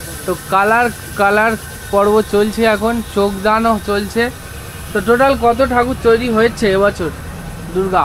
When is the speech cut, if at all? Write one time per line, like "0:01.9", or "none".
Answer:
none